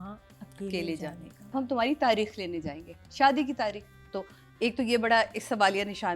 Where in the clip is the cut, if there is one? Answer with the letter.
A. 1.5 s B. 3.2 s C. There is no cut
A